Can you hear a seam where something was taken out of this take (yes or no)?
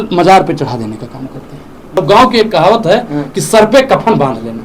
yes